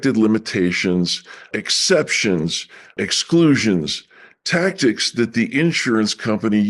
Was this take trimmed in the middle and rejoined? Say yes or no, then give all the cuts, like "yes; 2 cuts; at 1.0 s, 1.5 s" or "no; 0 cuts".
yes; 2 cuts; at 1.5 s, 3.0 s